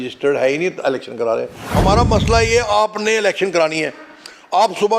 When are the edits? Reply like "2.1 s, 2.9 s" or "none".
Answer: 1.6 s